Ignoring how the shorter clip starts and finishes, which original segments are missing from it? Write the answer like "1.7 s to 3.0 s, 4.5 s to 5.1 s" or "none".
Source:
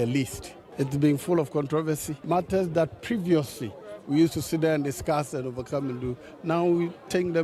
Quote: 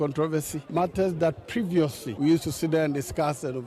3.6 s to 3.9 s